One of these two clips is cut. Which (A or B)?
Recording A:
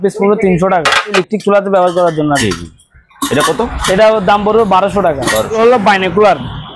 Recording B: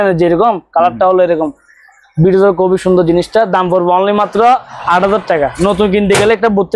A